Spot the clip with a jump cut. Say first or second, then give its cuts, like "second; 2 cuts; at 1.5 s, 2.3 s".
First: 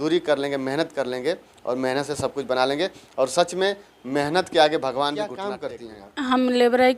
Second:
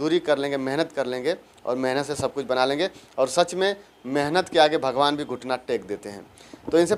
first; 1 cut; at 5.5 s